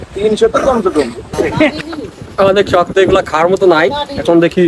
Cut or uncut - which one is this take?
cut